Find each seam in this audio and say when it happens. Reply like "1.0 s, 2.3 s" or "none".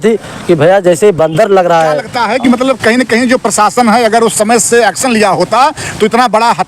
2.1 s

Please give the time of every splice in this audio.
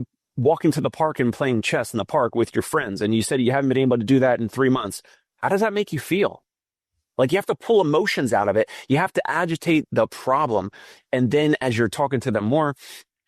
none

